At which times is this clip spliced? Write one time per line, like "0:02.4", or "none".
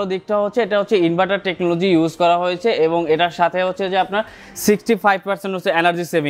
none